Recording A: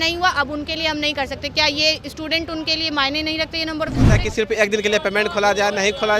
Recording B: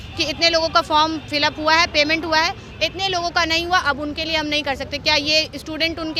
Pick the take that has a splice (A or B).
A